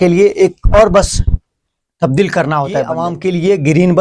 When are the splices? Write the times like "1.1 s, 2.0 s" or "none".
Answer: 3.0 s